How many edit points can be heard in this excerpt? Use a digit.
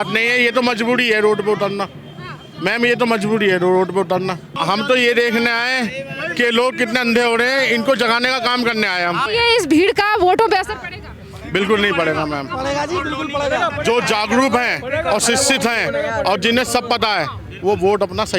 2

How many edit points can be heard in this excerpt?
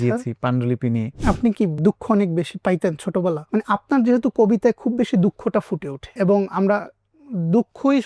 2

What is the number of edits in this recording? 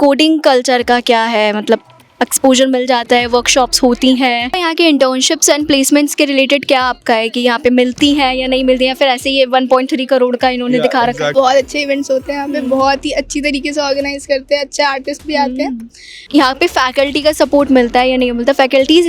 3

